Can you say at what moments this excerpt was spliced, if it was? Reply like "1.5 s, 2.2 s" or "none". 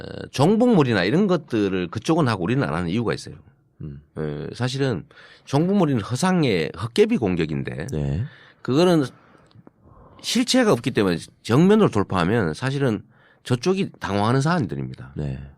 none